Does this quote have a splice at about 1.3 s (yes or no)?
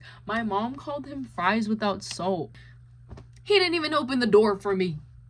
no